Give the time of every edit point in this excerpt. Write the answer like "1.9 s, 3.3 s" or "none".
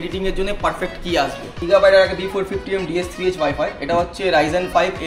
1.5 s